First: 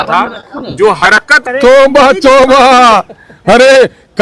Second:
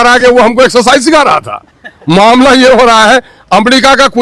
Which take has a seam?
first; 1 cut; at 1.4 s

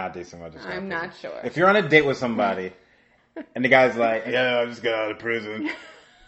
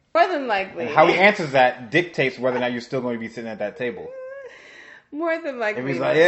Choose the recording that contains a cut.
first; 1 cut; at 4.3 s

